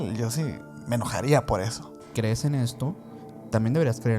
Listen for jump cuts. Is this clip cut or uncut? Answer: cut